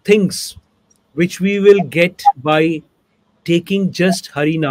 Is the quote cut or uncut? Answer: uncut